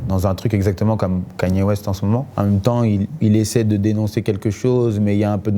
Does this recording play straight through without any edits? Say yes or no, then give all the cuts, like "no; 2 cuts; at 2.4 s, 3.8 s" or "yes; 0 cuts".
no; 1 cut; at 2.3 s